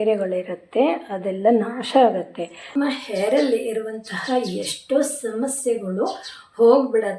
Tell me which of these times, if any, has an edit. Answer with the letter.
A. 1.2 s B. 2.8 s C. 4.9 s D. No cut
B